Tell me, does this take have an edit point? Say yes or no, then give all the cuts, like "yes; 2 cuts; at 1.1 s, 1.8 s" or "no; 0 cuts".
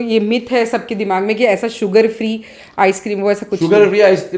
no; 0 cuts